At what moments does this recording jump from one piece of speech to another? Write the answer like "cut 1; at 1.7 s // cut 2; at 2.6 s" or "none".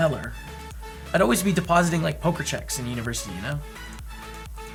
none